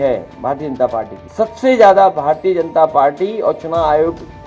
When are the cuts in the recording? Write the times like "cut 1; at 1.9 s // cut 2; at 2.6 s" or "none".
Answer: cut 1; at 1.2 s